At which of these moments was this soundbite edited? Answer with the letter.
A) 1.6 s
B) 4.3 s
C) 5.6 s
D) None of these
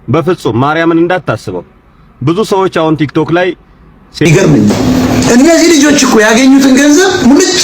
B